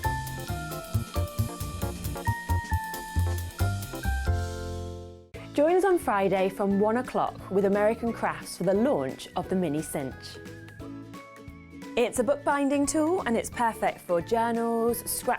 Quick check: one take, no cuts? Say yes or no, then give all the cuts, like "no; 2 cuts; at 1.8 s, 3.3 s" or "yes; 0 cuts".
no; 1 cut; at 5.2 s